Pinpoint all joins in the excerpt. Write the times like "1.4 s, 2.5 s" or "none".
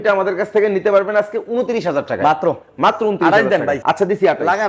3.8 s